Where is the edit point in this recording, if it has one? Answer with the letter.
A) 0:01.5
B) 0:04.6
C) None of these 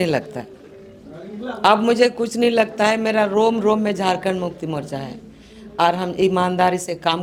C